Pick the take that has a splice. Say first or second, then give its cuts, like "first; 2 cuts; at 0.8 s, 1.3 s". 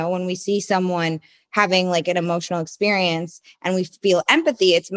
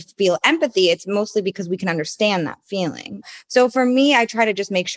second; 1 cut; at 3.2 s